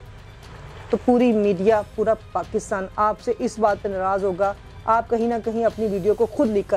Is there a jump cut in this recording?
no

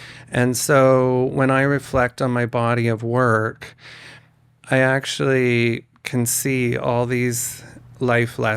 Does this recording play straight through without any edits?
yes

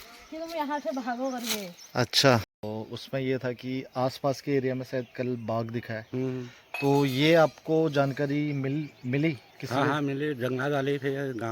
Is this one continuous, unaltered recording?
no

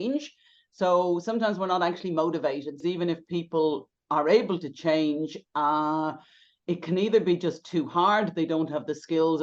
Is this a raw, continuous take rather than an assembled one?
no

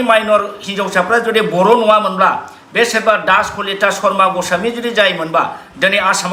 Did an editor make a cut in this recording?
no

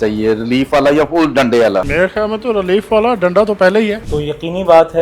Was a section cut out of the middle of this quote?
yes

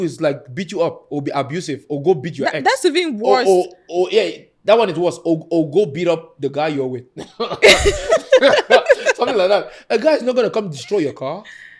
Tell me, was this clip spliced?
no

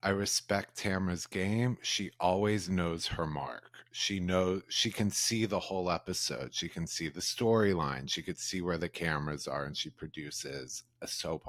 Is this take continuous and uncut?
yes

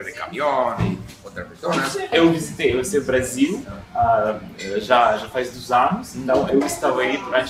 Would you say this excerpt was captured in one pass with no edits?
no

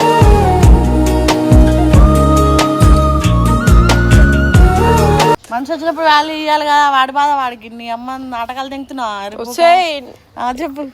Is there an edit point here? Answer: yes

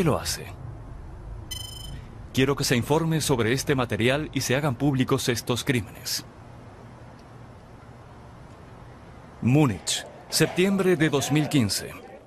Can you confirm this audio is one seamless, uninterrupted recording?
no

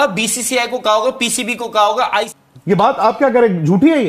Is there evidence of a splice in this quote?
yes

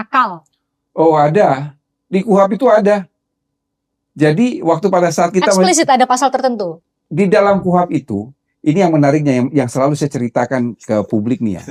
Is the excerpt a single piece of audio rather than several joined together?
yes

